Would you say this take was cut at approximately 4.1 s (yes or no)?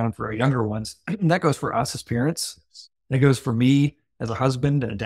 no